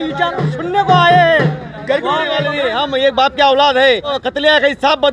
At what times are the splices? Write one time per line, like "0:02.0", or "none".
0:02.5
0:04.2